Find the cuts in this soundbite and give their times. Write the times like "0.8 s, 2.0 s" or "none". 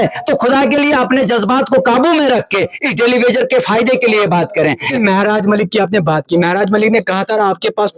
4.9 s